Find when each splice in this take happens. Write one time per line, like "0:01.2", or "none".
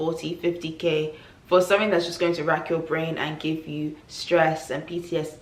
none